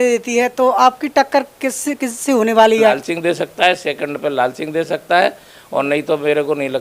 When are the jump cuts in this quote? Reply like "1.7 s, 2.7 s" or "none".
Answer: 3.1 s